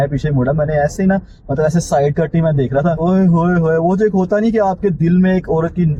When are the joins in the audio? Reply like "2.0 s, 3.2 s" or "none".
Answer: none

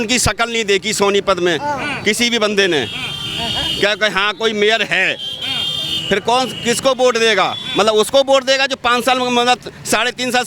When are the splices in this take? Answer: none

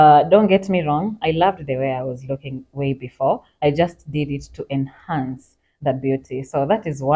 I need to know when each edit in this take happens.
none

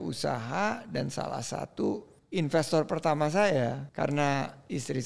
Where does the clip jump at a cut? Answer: 2.1 s, 3.8 s

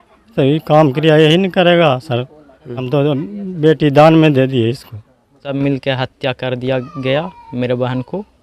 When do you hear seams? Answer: 2.8 s, 5.5 s

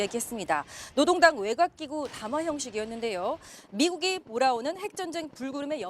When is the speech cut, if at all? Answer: 2.1 s

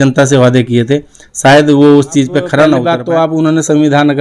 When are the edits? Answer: 2.9 s

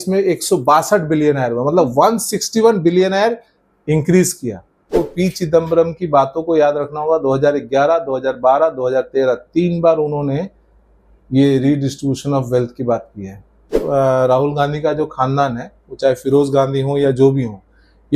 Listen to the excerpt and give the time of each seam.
4.9 s, 13.8 s

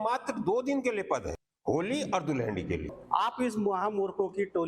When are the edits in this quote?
1.4 s, 2.9 s

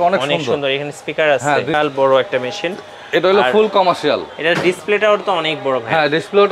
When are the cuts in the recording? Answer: 1.7 s

